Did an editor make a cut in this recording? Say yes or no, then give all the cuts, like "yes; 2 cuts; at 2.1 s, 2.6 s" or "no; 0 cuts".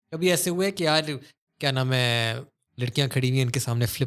no; 0 cuts